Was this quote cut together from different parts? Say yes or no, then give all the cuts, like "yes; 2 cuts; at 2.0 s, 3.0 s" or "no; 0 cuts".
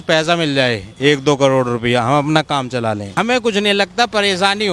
yes; 1 cut; at 3.1 s